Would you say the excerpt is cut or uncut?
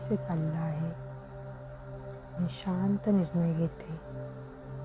uncut